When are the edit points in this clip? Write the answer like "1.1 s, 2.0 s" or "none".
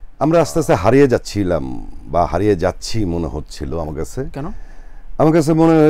none